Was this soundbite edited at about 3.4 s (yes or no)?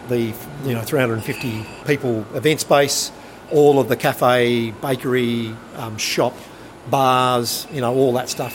yes